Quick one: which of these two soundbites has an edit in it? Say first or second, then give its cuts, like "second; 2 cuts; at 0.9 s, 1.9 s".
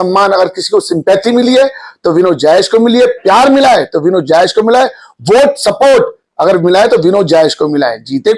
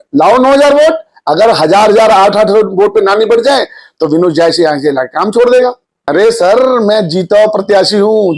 second; 1 cut; at 6.0 s